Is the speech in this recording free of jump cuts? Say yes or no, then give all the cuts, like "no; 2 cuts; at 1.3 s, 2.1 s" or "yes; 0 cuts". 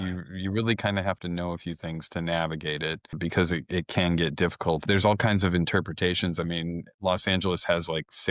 no; 2 cuts; at 3.1 s, 4.8 s